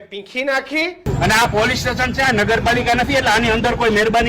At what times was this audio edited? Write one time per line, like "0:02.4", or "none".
0:01.1